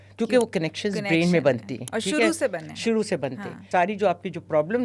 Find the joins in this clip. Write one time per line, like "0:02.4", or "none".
0:03.5

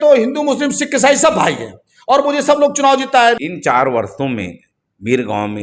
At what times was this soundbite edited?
0:03.4

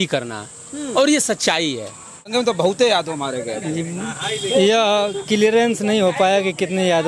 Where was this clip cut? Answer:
0:02.4

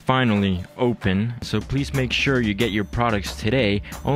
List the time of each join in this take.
0:01.4

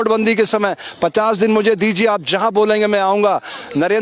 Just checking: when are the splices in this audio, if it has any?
none

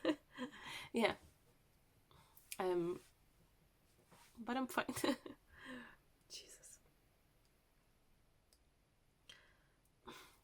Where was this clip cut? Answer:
none

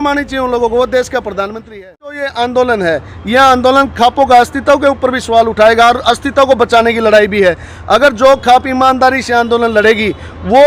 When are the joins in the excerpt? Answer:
0:02.3

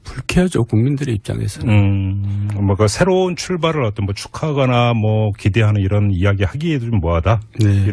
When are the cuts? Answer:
none

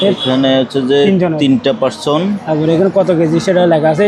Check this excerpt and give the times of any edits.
none

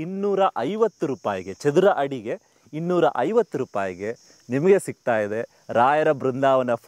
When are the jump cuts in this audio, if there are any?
none

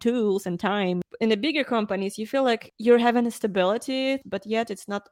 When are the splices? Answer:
0:01.0
0:02.7
0:04.2

